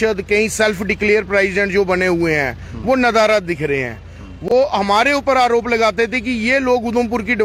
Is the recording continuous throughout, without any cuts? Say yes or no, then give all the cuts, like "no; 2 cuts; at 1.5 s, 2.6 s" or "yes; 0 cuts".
yes; 0 cuts